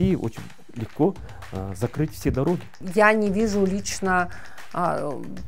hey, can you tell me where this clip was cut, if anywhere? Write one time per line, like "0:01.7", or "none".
0:02.8